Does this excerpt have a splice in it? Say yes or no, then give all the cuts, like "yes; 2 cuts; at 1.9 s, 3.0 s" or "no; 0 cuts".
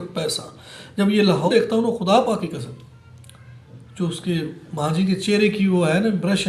yes; 1 cut; at 1.5 s